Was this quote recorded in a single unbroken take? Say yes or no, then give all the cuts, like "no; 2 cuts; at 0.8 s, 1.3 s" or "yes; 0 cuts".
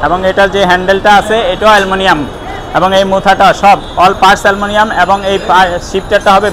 yes; 0 cuts